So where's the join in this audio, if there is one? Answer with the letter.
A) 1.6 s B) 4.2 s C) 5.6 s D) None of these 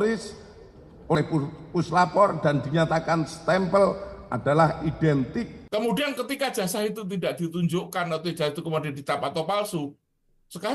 C